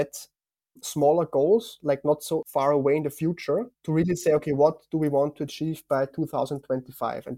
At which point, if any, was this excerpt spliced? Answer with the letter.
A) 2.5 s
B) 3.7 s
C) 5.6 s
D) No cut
A